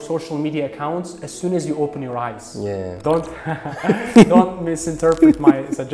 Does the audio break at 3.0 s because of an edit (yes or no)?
yes